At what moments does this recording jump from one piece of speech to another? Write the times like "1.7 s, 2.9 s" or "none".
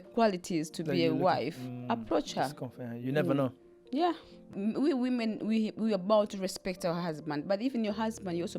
4.6 s